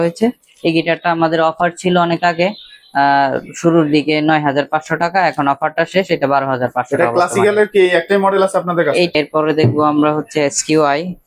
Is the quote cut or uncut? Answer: cut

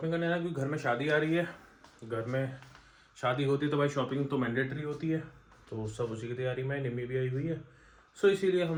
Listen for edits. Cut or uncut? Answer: uncut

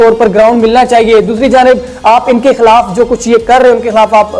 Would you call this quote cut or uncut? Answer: uncut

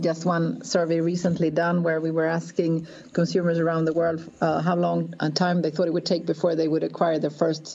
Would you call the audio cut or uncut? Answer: uncut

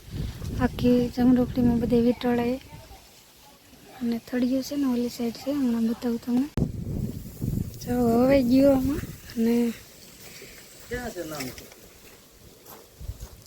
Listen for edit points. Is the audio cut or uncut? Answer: cut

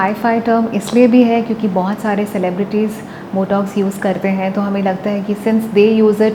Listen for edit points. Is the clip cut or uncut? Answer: uncut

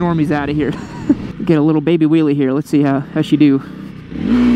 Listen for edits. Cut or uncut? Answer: cut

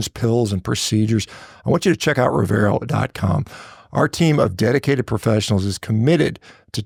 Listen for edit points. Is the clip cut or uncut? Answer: uncut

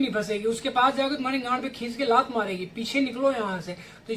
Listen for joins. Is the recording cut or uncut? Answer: uncut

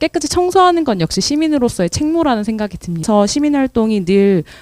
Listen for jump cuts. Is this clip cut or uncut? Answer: cut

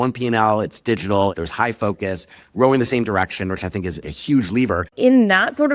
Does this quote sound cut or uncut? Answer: cut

